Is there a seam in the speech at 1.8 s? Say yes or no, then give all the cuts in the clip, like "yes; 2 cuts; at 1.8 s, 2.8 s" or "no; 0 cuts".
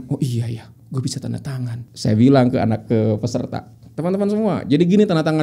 yes; 1 cut; at 1.8 s